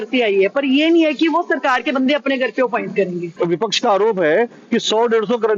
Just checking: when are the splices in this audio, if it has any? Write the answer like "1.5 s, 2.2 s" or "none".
3.4 s